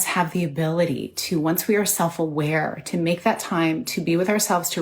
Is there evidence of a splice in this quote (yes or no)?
no